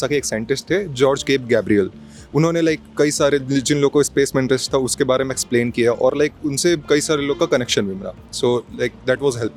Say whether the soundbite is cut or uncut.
uncut